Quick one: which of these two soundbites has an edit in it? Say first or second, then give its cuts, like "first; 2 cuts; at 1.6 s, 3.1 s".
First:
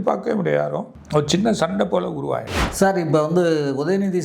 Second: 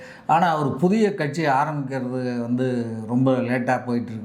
first; 2 cuts; at 1.0 s, 2.6 s